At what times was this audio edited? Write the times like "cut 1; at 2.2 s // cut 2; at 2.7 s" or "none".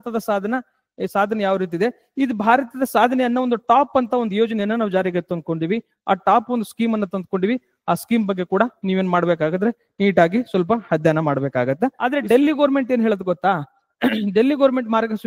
cut 1; at 12.0 s